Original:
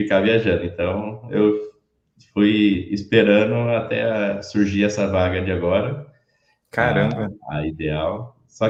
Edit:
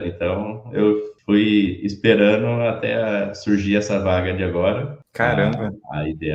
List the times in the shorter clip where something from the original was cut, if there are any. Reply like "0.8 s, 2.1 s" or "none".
1.1 s, 5.0 s